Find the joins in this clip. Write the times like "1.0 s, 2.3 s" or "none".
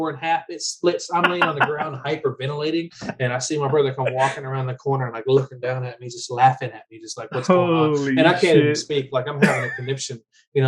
none

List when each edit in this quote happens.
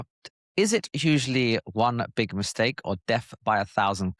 none

